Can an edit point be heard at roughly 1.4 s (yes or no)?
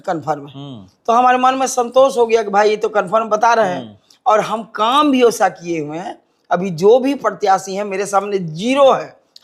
no